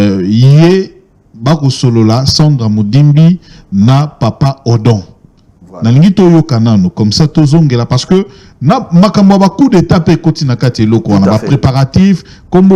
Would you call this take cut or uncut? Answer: uncut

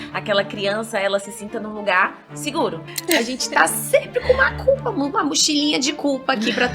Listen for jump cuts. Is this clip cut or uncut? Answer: cut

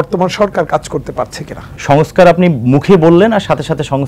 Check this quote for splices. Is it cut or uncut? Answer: cut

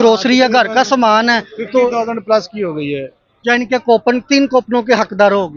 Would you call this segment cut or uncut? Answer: uncut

